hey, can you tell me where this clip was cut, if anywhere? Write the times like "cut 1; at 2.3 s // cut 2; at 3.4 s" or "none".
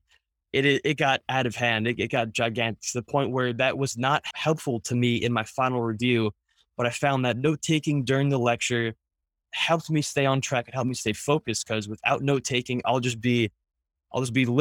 cut 1; at 4.3 s // cut 2; at 9.4 s